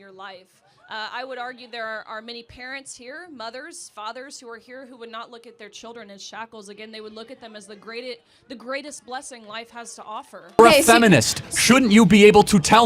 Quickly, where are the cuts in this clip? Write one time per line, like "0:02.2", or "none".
0:10.6